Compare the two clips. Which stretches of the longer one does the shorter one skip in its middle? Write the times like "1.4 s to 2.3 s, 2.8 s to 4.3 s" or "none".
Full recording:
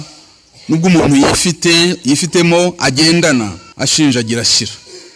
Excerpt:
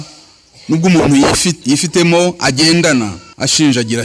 1.6 s to 2.0 s